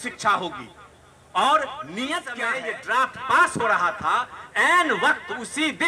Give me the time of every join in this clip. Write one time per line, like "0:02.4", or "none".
0:02.4